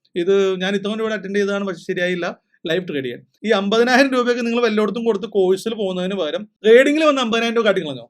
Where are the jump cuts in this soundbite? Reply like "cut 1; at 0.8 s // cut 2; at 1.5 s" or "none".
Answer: cut 1; at 3.3 s